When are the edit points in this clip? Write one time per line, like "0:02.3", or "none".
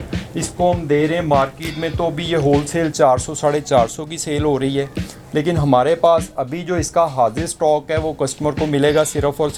none